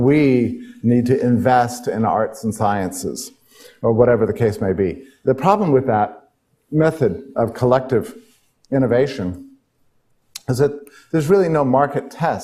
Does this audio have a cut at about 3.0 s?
no; 0 cuts

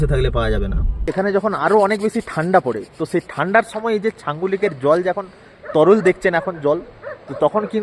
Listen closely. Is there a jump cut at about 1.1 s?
yes; 1 cut; at 1.1 s

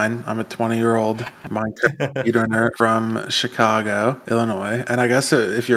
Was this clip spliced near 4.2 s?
no; 0 cuts

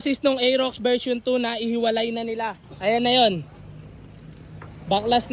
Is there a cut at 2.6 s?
no; 0 cuts

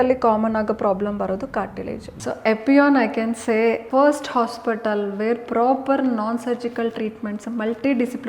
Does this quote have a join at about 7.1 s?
no; 2 cuts; at 2.1 s, 3.8 s

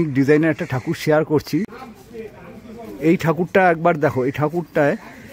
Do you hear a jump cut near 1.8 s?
yes; 1 cut; at 1.8 s

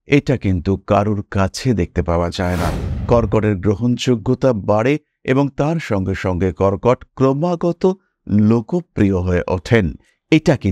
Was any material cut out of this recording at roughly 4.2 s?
no; 1 cut; at 2.9 s

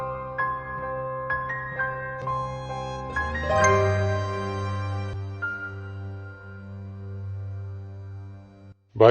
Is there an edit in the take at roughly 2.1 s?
yes; 1 cut; at 2.1 s

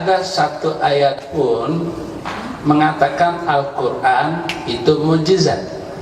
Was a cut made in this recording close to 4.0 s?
no; 1 cut; at 1.2 s

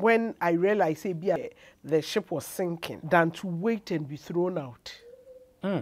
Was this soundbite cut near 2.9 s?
yes; 2 cuts; at 1.4 s, 2.9 s

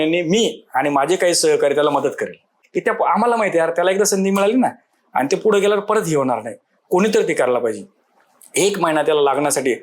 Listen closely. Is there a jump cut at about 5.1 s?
no; 1 cut; at 2.6 s

